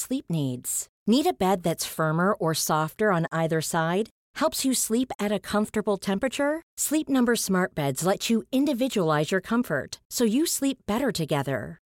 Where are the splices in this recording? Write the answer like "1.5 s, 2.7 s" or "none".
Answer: none